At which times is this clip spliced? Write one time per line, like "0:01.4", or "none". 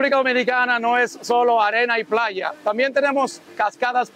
none